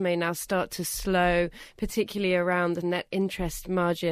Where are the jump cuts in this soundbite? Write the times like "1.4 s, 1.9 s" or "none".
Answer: 2.8 s